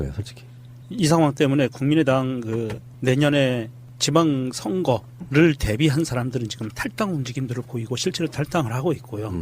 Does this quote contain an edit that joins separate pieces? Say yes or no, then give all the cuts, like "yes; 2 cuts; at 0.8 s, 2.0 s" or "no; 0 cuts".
yes; 1 cut; at 3.9 s